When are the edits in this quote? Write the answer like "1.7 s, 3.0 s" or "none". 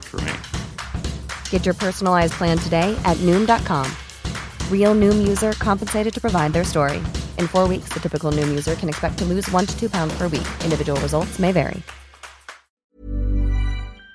12.8 s